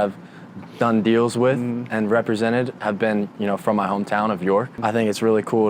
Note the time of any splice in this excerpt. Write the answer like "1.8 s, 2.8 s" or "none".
4.7 s